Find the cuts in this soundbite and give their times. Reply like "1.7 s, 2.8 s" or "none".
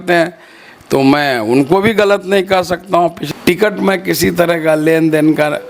3.2 s